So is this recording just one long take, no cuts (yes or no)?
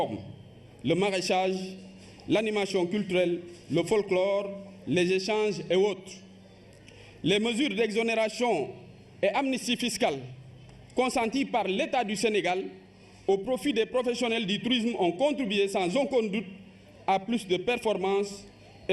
yes